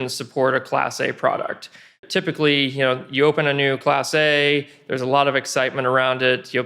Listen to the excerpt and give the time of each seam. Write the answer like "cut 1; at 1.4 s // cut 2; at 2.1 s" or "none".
cut 1; at 2.0 s

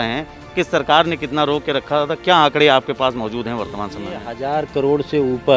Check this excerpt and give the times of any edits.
none

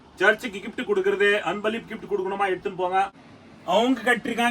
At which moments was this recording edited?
cut 1; at 3.2 s

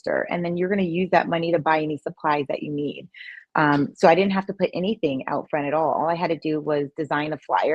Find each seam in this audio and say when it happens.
none

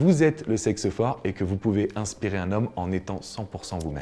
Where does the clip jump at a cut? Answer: none

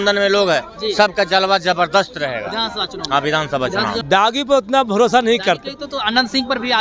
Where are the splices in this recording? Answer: cut 1; at 4.0 s

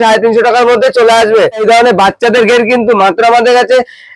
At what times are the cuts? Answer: cut 1; at 1.6 s

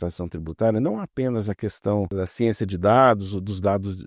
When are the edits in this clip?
cut 1; at 2.1 s

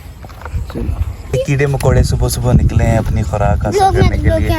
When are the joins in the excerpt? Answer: cut 1; at 1.3 s

